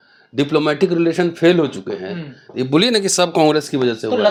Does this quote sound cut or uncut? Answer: uncut